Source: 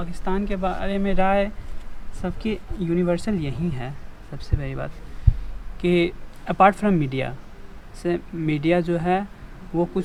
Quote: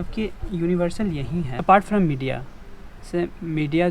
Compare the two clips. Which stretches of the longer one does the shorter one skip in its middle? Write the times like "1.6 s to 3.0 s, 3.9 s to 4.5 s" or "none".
3.8 s to 6.5 s